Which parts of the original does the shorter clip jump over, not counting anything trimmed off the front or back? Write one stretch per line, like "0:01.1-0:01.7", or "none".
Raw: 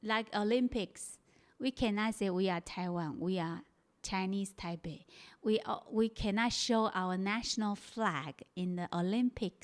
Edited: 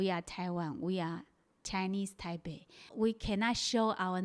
0:05.3-0:05.8